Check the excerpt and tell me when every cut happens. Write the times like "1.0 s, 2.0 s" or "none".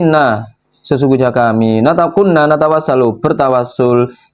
none